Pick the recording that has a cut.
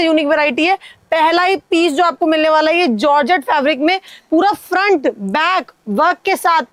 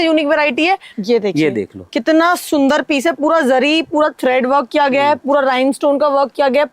second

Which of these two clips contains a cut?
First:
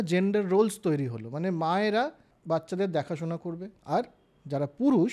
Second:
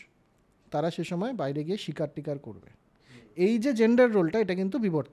first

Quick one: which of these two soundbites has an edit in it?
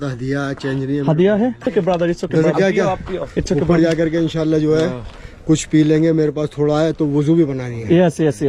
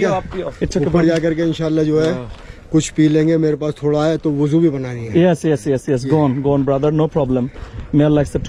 first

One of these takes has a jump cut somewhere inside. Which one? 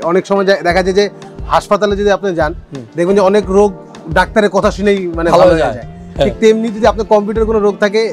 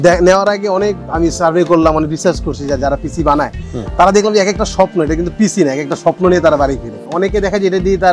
second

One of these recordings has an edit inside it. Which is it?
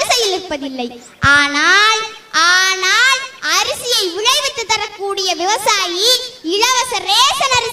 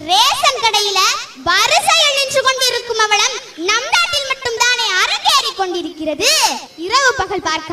second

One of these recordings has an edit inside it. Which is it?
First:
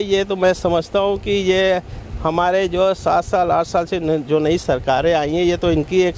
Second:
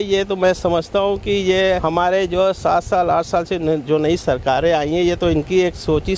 second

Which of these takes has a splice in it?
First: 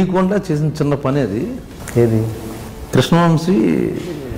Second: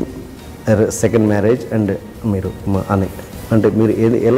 first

